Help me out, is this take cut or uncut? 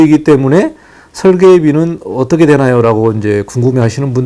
uncut